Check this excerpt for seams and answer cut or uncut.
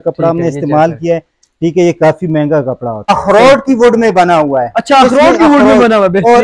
cut